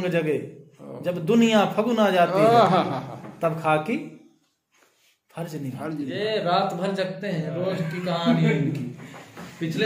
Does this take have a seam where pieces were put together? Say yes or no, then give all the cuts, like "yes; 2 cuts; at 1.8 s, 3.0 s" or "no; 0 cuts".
yes; 1 cut; at 6.1 s